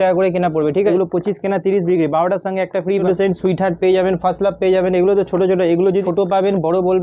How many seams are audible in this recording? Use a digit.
3